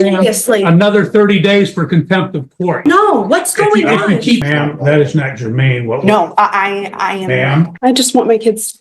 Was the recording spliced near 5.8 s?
no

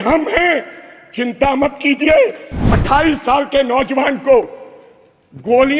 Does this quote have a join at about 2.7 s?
yes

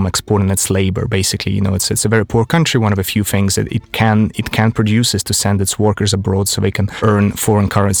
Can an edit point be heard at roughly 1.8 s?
no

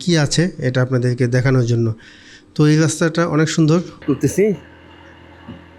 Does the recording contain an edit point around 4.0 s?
yes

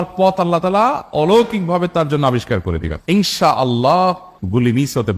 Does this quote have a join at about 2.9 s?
yes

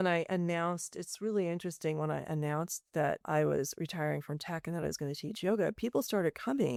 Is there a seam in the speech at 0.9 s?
no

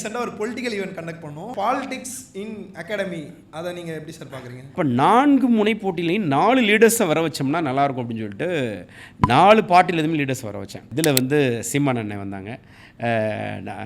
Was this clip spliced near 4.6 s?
yes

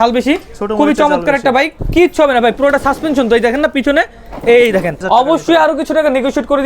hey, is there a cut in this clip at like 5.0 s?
yes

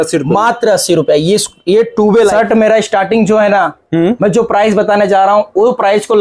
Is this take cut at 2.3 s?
yes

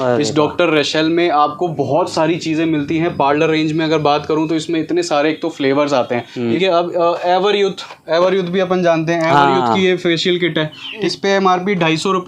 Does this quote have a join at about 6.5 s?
yes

